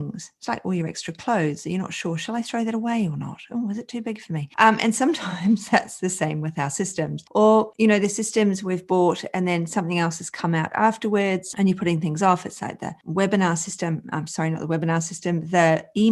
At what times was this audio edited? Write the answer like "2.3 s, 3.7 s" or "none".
none